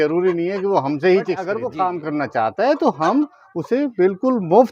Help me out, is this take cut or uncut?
cut